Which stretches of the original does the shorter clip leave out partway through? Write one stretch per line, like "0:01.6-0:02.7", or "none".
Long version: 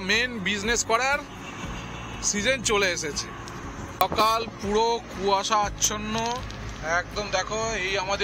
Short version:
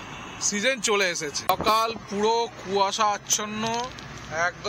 0:03.1-0:03.8

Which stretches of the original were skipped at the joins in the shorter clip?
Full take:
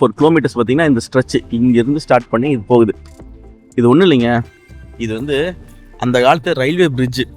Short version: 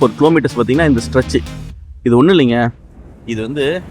0:01.5-0:03.2

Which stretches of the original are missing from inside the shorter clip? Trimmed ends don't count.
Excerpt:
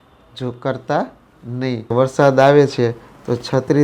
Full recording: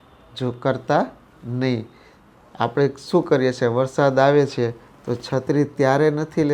0:01.9-0:03.7

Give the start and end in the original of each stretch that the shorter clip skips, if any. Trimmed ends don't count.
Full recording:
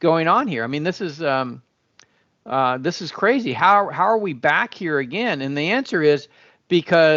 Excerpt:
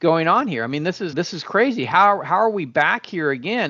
0:01.1-0:02.8

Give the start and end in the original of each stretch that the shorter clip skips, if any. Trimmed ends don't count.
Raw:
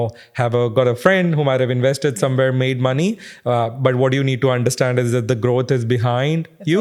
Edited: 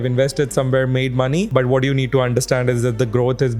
0:03.1-0:03.8

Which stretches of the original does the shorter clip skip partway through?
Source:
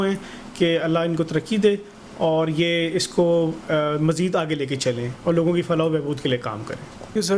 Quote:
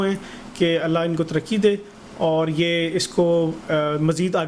none

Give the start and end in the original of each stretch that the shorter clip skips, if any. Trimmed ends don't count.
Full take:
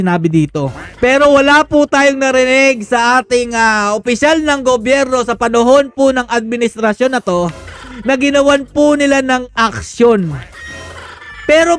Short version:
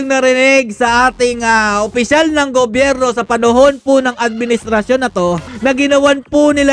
0:07.6-0:07.9

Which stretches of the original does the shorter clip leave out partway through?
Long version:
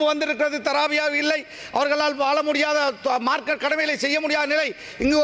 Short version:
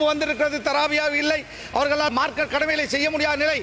0:02.1-0:03.2

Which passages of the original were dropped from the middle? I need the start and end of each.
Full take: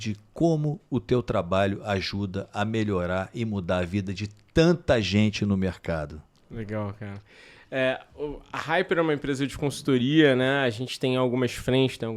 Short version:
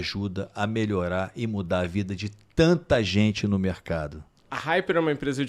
0:06.4-0:08.5

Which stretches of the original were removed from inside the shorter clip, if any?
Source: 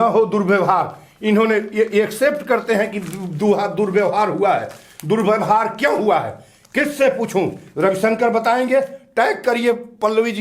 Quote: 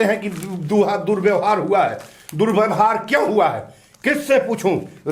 none

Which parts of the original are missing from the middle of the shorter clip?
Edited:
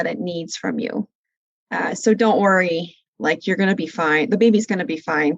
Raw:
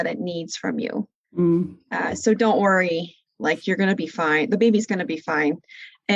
0:01.4-0:01.6

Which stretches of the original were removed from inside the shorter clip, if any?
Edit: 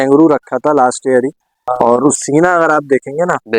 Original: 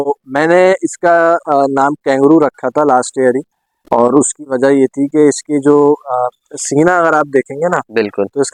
0:04.3-0:06.6

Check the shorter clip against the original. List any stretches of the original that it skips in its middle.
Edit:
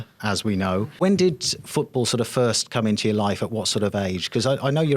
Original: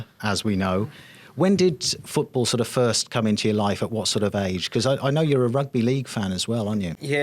0:00.9-0:01.3

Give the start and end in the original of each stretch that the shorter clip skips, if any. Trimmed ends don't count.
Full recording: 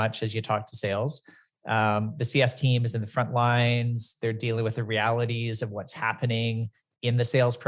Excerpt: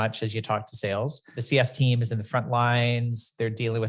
0:01.3-0:02.2

